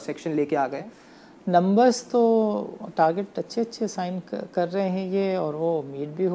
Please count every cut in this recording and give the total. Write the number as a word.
one